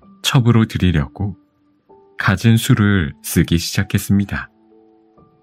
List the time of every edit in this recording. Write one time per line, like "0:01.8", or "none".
none